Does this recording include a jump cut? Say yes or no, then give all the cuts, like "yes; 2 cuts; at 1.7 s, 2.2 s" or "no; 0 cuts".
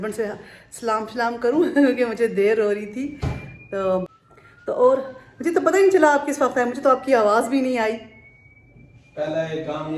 no; 0 cuts